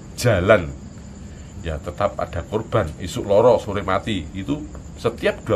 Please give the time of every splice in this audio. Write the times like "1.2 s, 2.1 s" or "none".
none